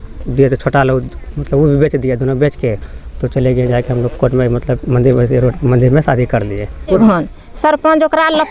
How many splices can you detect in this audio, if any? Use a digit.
1